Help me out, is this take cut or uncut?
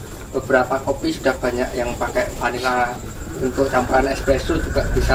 uncut